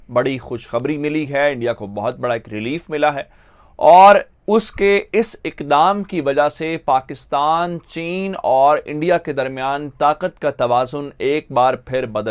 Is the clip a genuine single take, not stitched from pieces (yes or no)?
yes